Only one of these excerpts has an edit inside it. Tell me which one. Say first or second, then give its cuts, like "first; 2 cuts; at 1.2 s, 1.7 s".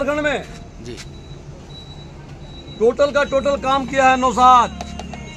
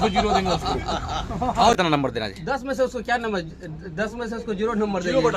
second; 1 cut; at 1.8 s